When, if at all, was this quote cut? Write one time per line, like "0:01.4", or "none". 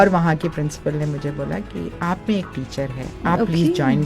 0:03.1